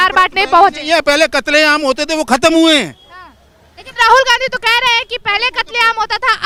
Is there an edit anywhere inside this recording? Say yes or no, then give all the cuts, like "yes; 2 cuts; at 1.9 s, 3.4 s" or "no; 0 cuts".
no; 0 cuts